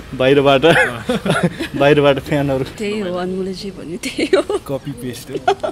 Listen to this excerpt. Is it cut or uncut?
cut